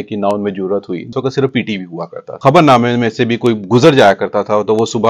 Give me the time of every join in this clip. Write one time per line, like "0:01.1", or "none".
0:01.1
0:02.3